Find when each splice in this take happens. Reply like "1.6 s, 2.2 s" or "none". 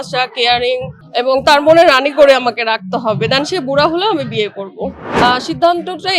1.0 s, 5.0 s